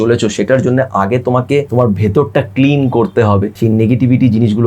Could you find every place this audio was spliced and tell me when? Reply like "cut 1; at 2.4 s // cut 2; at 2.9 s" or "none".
cut 1; at 1.7 s // cut 2; at 3.5 s